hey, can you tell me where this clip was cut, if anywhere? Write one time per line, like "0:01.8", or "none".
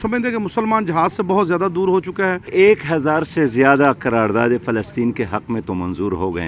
0:02.5

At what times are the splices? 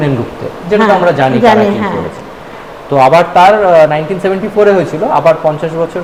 none

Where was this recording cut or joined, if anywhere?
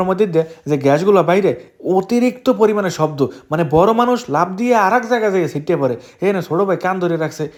none

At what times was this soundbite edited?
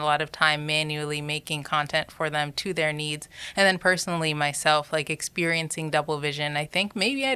none

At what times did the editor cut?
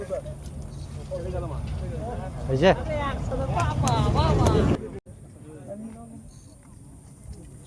0:05.1

